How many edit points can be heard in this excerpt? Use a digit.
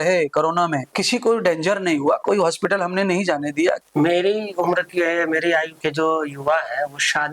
2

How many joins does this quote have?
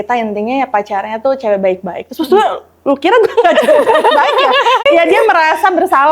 1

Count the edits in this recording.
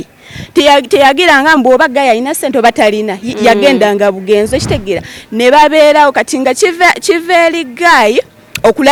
0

